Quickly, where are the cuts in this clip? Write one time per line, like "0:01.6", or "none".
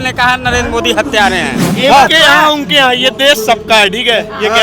0:01.6